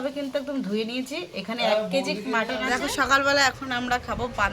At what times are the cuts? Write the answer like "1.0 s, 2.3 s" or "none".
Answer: 2.6 s